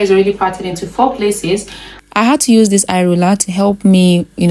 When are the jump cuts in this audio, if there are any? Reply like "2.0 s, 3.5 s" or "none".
1.7 s